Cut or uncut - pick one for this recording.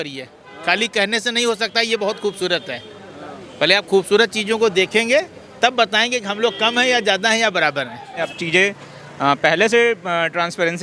cut